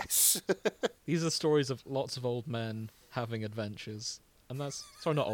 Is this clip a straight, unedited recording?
no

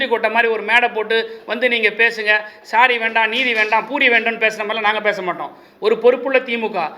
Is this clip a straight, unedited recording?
yes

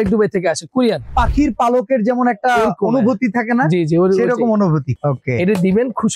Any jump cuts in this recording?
yes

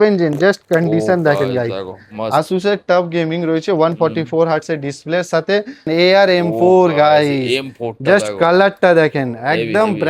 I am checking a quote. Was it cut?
yes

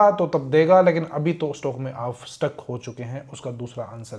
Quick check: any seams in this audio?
no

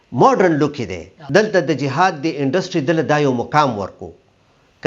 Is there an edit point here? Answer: yes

